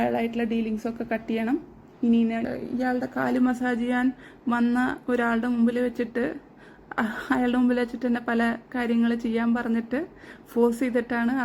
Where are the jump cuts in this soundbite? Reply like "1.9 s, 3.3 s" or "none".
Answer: 2.4 s